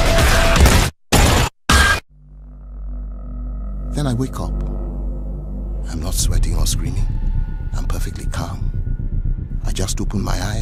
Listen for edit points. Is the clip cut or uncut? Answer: uncut